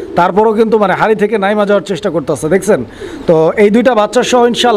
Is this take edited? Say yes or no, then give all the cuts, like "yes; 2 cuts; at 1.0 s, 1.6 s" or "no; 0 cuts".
no; 0 cuts